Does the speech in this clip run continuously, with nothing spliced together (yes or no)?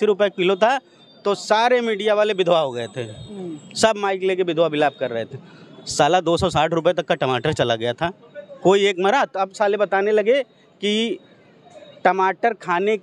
yes